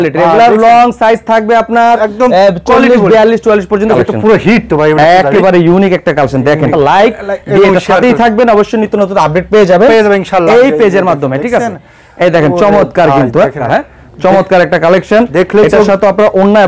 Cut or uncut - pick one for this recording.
cut